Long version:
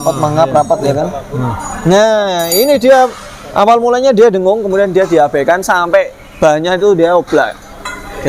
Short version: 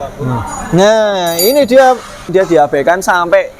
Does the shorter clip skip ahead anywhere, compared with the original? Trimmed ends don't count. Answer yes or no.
yes